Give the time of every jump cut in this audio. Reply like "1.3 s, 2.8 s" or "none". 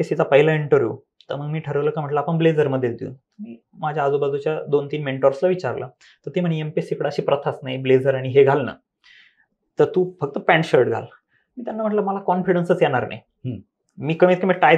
none